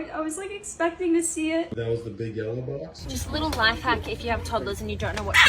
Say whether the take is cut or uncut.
cut